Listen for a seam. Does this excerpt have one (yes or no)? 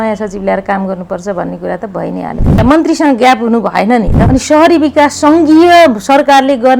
yes